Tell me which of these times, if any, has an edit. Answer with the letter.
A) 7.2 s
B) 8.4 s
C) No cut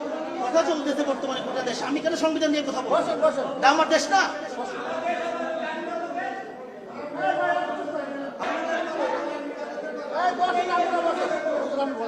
B